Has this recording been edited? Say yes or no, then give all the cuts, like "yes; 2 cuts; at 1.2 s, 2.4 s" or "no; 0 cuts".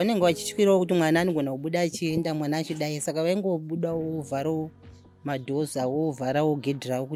no; 0 cuts